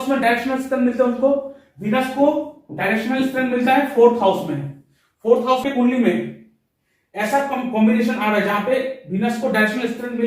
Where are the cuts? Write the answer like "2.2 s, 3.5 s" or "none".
5.6 s